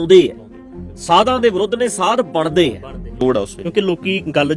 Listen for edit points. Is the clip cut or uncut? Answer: uncut